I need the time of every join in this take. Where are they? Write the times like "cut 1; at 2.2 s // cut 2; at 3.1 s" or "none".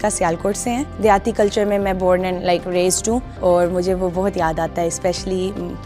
cut 1; at 0.9 s // cut 2; at 3.3 s